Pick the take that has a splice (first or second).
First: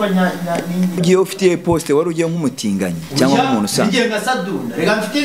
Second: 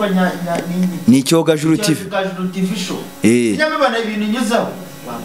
first